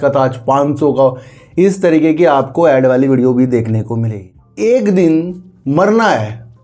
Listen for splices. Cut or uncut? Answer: cut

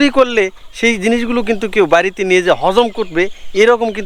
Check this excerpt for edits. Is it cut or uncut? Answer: uncut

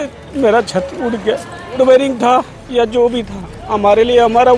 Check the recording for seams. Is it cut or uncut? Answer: cut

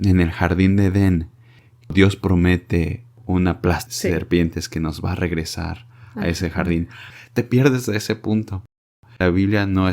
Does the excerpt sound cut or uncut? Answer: cut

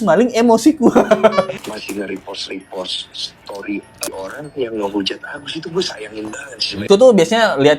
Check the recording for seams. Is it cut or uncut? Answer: cut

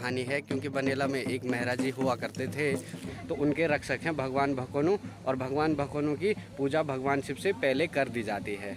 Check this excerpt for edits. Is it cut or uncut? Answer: cut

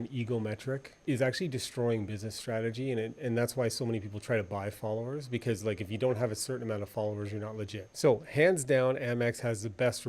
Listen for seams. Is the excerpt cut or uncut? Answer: cut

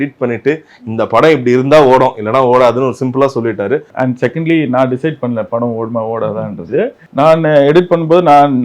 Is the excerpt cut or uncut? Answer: cut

